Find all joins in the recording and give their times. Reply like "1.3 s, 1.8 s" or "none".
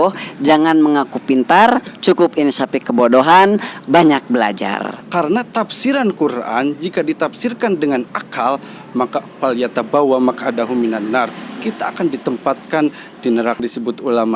4.9 s, 13.6 s